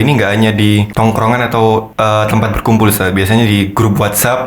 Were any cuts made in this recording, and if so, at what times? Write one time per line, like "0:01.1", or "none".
0:00.9
0:01.9